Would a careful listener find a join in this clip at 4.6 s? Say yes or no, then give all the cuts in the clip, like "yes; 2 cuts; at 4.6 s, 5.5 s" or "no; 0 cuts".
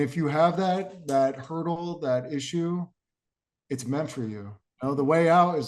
yes; 1 cut; at 4.6 s